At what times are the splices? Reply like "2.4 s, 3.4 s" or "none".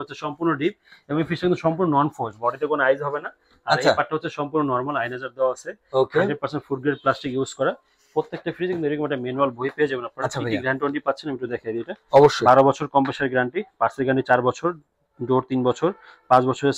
none